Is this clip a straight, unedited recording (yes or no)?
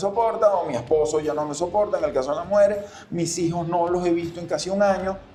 yes